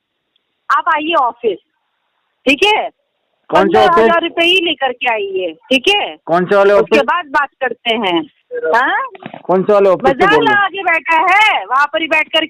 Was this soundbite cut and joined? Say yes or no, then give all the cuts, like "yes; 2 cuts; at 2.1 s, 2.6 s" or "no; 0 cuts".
yes; 1 cut; at 8.4 s